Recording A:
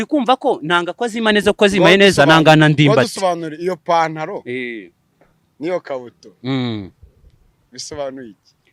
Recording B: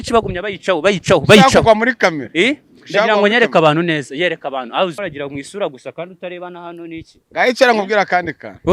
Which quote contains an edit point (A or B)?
B